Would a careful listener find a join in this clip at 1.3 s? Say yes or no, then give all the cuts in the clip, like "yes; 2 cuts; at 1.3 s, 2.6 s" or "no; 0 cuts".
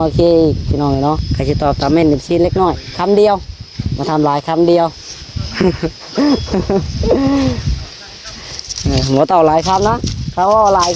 yes; 1 cut; at 1.3 s